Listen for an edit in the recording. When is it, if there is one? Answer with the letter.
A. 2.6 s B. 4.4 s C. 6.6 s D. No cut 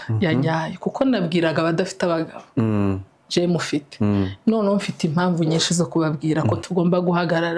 C